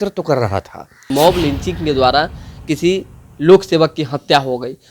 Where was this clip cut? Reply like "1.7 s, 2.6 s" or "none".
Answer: 1.0 s